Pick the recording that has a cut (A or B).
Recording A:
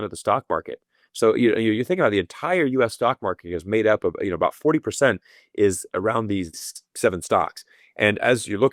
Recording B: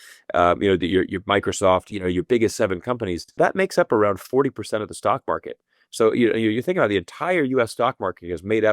B